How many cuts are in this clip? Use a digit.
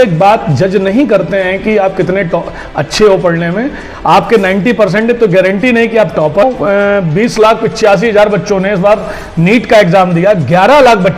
1